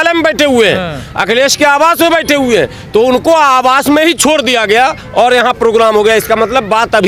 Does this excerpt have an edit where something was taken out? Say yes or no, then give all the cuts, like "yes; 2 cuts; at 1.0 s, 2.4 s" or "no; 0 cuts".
no; 0 cuts